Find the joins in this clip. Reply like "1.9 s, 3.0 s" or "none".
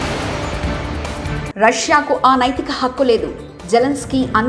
1.4 s